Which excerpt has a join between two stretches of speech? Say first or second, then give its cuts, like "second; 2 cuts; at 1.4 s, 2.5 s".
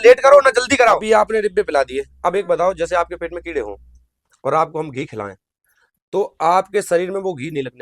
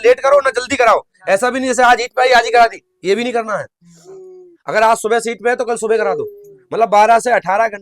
first; 1 cut; at 1.0 s